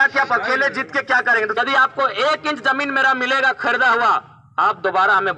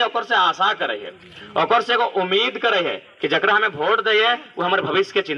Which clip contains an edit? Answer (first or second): first